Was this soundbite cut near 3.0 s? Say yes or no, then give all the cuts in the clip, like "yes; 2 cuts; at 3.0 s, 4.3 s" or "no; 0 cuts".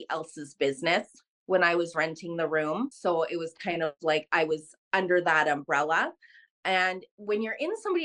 yes; 1 cut; at 3.0 s